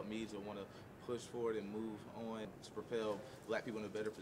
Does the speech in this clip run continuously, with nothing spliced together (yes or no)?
yes